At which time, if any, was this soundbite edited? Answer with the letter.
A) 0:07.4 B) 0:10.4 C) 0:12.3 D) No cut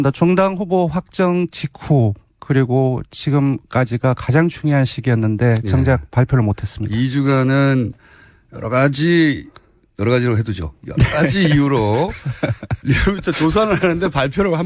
D